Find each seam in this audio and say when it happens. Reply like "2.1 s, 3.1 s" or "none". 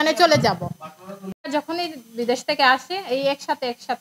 1.3 s